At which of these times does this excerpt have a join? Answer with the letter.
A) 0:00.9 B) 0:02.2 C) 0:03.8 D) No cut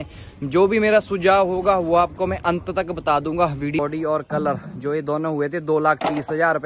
C